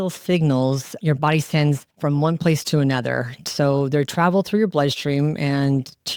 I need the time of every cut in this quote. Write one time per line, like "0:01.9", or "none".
none